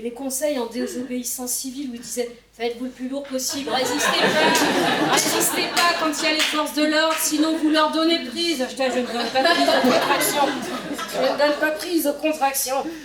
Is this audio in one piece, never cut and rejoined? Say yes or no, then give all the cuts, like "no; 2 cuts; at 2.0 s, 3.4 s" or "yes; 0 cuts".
yes; 0 cuts